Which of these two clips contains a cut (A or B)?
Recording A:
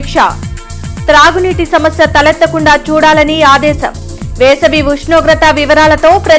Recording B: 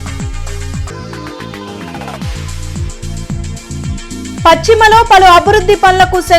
B